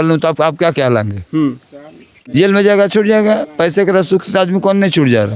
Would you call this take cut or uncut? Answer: cut